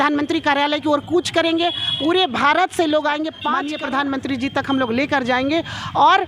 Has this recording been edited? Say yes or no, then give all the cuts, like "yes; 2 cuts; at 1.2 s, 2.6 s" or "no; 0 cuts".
yes; 1 cut; at 3.7 s